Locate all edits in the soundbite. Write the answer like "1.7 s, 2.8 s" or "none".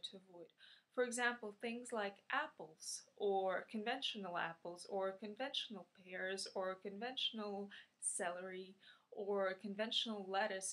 5.2 s